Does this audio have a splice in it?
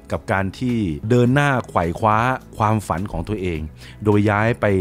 no; 0 cuts

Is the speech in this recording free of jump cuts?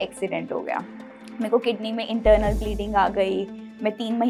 yes; 0 cuts

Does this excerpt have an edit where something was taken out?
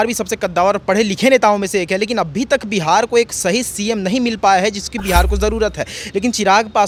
no; 0 cuts

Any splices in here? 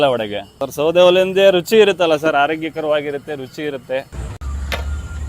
yes; 1 cut; at 4.2 s

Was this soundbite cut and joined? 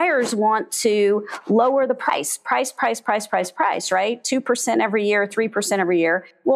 no; 0 cuts

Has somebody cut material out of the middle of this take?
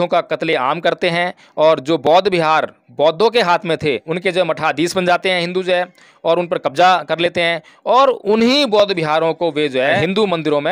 yes; 2 cuts; at 4.1 s, 10.0 s

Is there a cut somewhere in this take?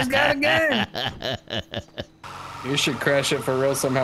yes; 1 cut; at 2.4 s

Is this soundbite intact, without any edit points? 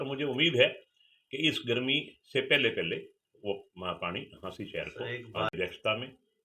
no; 1 cut; at 5.5 s

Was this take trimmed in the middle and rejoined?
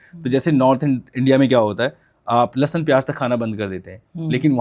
no; 0 cuts

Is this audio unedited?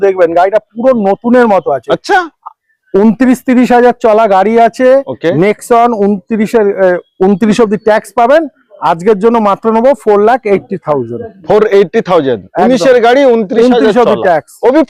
yes; 0 cuts

